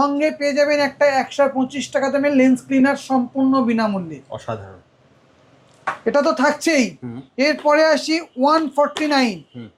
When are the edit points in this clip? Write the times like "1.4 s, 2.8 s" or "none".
none